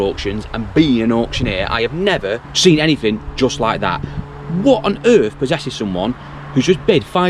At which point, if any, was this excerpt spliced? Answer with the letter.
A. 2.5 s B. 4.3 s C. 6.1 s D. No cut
A